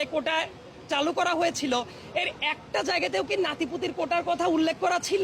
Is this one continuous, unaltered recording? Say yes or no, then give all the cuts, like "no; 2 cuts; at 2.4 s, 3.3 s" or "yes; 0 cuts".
yes; 0 cuts